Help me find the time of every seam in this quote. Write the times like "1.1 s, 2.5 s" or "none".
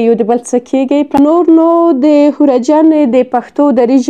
1.2 s